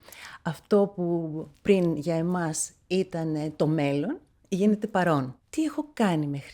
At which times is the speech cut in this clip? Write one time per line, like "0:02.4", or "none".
0:05.4